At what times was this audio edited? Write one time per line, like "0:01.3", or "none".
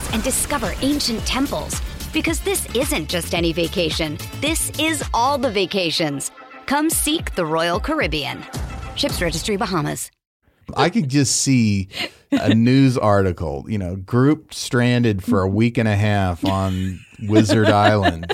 0:10.7